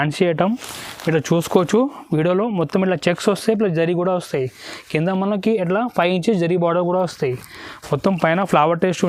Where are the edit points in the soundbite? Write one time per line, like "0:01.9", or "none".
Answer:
none